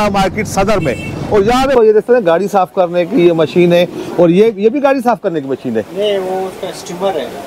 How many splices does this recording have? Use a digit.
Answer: 1